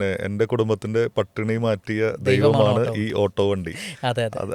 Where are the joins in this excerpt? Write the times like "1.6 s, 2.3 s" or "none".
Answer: none